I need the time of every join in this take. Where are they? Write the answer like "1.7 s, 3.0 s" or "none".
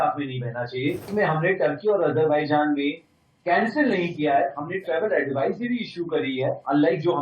1.1 s